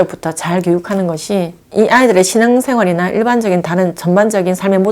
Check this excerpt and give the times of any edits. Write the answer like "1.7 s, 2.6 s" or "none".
1.6 s